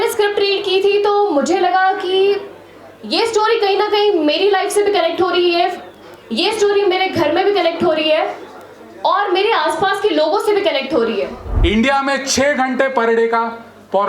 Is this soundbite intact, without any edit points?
no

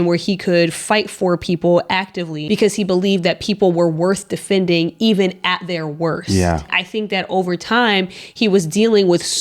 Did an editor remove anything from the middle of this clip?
yes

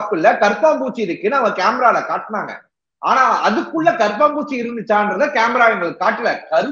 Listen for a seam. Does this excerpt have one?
no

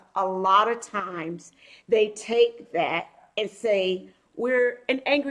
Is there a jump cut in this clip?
no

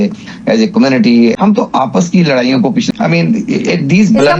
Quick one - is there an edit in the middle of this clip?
yes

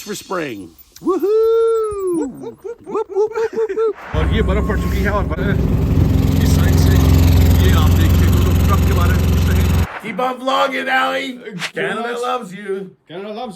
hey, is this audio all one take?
no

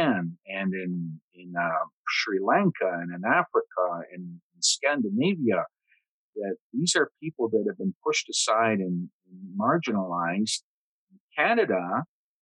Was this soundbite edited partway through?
no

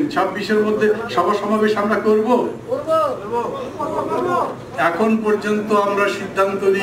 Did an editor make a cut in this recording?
no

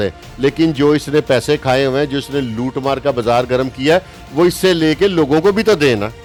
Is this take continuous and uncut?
yes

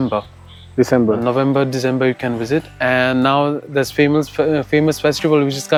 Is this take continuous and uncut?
yes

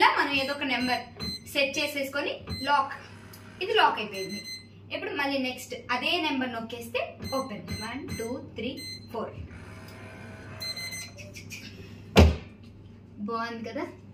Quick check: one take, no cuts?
yes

